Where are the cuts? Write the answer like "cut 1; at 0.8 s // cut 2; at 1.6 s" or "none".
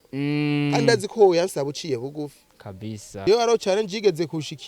cut 1; at 3.1 s